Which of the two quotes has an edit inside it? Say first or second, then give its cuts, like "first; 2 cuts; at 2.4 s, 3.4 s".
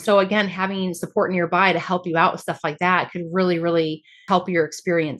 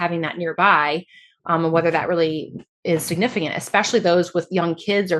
first; 1 cut; at 4.2 s